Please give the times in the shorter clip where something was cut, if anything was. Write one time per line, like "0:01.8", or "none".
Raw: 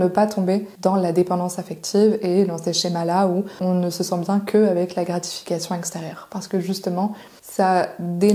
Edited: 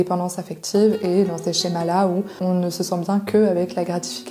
none